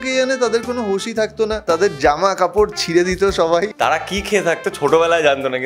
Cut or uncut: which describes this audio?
cut